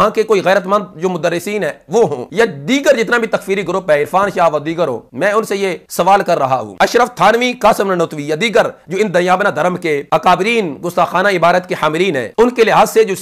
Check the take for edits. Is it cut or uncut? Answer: uncut